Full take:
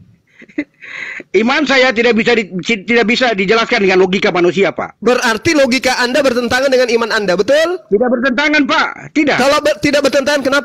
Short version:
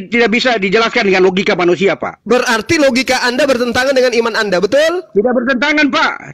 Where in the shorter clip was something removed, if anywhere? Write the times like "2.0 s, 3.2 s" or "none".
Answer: none